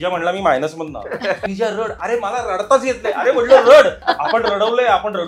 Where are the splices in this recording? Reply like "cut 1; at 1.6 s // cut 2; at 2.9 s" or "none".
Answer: cut 1; at 1.4 s // cut 2; at 4.0 s